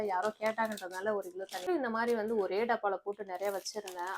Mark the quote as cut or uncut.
cut